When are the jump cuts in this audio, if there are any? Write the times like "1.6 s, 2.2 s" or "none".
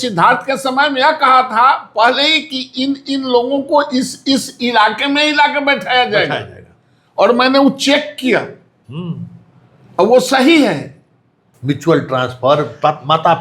11.5 s